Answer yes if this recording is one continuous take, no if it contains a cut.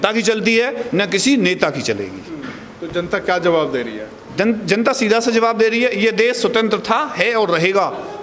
yes